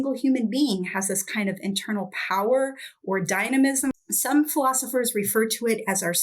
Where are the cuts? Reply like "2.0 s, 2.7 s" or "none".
3.9 s

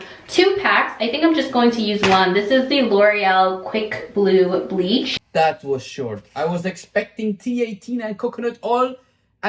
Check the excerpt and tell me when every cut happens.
none

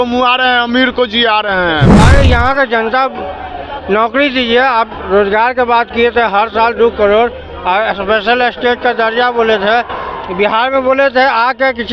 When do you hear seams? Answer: 2.0 s

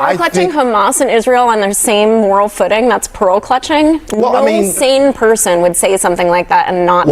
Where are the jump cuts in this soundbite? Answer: 3.5 s

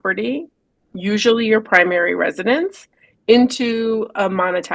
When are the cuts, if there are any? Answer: none

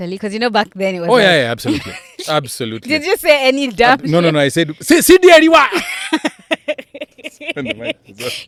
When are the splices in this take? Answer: none

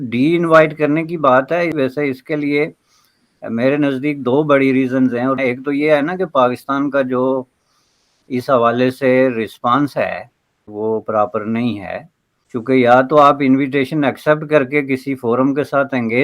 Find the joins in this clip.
none

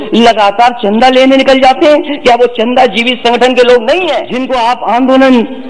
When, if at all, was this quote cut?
4.3 s

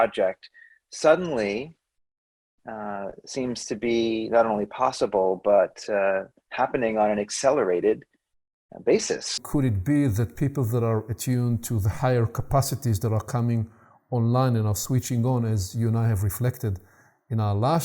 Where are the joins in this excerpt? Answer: 9.3 s

